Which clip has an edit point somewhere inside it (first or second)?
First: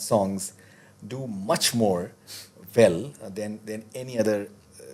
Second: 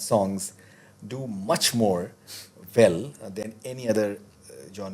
second